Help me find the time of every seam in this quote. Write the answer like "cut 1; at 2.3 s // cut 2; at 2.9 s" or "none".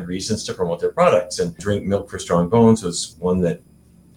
cut 1; at 1.6 s // cut 2; at 3.0 s